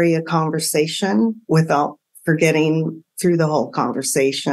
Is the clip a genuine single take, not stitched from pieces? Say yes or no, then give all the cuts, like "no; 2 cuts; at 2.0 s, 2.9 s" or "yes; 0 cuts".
yes; 0 cuts